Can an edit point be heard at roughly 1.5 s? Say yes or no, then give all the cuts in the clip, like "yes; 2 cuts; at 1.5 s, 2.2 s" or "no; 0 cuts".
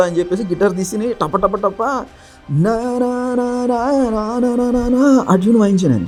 no; 0 cuts